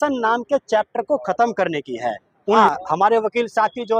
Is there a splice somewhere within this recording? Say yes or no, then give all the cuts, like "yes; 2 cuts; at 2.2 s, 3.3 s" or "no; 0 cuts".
yes; 1 cut; at 2.6 s